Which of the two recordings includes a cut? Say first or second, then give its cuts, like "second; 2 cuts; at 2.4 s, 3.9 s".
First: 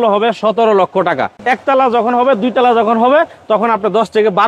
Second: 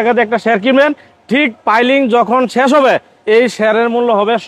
first; 1 cut; at 1.4 s